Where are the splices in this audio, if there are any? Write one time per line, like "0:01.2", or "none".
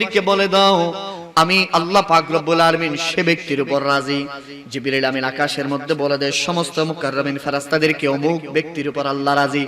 0:01.7